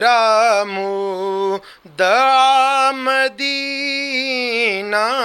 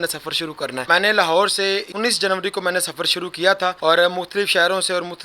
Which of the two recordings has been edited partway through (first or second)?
second